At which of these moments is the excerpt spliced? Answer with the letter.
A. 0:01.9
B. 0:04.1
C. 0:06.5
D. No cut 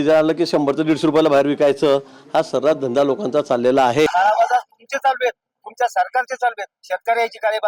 B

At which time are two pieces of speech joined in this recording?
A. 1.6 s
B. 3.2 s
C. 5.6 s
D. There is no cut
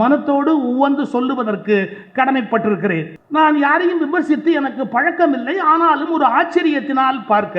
B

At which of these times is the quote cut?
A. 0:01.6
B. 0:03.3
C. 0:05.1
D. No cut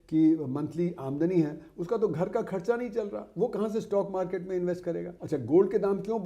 C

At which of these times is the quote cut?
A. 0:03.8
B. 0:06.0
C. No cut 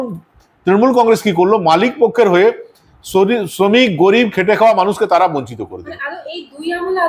C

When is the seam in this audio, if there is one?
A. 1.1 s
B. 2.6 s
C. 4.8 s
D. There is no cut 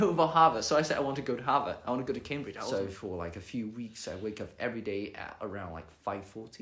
B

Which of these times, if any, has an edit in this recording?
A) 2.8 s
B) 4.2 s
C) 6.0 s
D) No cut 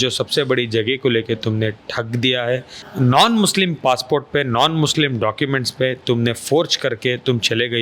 A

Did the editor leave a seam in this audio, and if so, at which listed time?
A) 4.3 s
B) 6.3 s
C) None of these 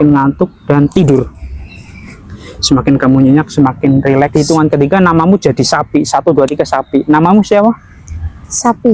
A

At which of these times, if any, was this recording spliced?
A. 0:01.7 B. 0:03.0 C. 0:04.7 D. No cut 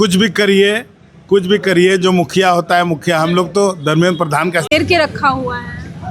C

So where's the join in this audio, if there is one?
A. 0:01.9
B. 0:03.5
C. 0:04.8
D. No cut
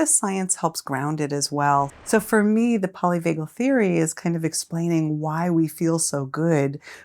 A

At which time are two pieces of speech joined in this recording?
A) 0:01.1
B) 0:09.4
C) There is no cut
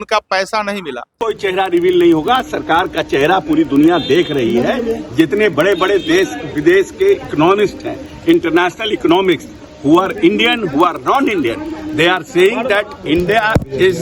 A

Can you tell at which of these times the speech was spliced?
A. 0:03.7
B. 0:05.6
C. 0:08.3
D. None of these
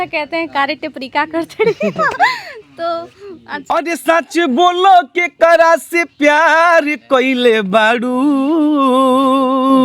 A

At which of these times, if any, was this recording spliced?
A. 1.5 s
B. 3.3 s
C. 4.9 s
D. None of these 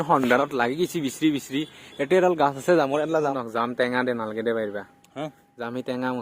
B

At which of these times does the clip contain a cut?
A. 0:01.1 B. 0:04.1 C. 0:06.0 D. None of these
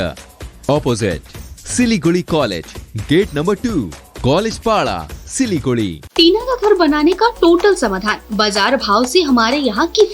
C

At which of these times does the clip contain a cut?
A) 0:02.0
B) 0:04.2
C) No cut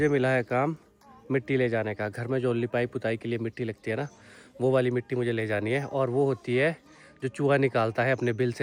C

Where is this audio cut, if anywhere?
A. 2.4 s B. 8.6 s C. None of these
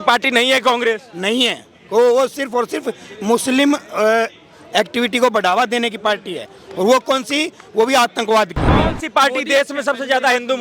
B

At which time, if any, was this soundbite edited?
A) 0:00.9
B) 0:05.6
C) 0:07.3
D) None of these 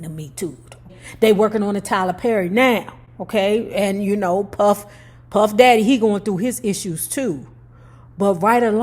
A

